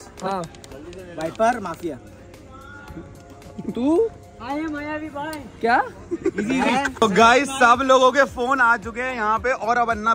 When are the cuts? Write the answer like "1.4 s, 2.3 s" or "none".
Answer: 6.9 s